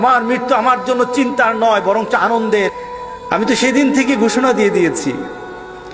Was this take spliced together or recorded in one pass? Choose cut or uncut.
cut